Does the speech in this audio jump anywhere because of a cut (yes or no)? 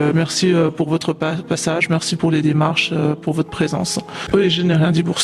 yes